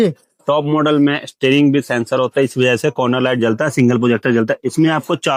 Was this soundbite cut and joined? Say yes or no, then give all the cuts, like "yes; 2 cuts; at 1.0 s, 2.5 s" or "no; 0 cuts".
no; 0 cuts